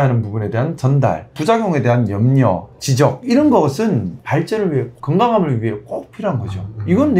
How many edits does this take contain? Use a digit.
1